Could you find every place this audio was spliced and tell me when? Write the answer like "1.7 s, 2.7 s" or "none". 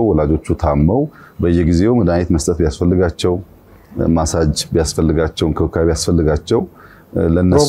none